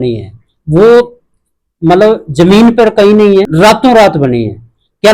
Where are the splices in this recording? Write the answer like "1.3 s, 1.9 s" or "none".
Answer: 3.5 s